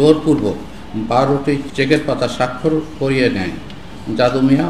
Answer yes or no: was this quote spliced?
yes